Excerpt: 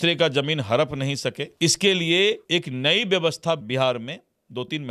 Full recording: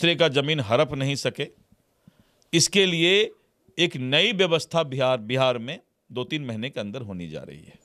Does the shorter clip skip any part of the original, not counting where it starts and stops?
yes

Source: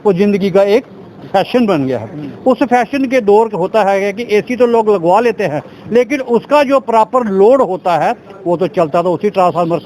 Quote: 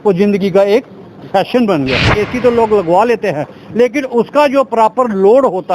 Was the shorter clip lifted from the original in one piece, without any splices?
no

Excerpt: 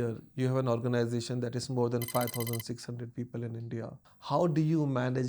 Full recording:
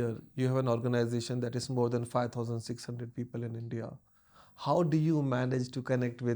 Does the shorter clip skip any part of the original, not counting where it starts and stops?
yes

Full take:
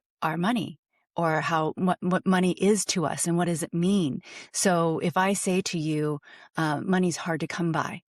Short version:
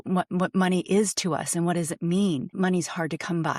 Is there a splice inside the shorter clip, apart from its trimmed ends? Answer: yes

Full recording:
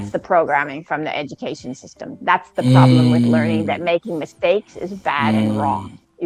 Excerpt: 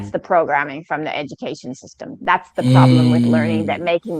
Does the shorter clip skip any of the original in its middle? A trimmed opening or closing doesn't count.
no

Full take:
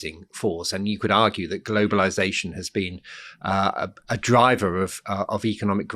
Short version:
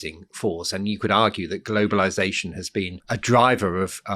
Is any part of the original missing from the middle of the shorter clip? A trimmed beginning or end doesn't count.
yes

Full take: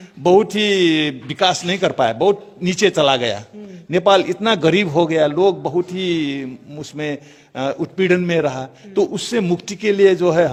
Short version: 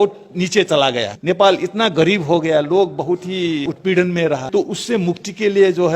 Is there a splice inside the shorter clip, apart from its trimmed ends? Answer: yes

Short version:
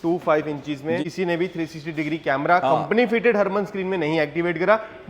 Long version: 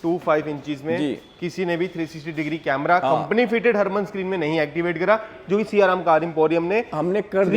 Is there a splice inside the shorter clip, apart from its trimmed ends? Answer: yes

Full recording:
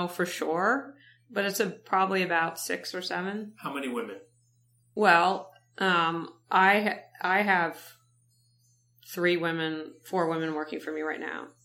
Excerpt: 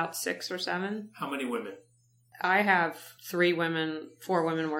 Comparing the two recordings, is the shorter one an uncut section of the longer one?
no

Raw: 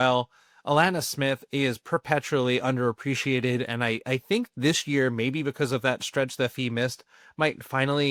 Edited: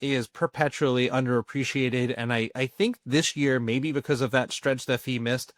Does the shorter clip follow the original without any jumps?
yes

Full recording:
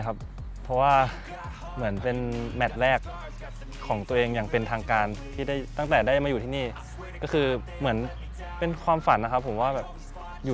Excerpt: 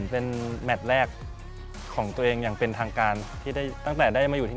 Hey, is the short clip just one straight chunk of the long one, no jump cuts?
yes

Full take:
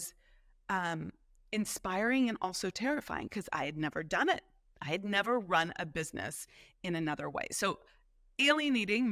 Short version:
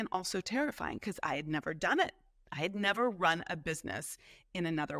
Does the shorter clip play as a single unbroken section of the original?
yes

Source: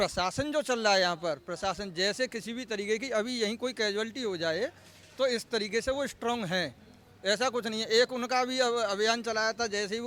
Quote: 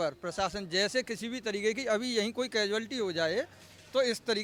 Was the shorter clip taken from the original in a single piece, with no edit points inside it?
yes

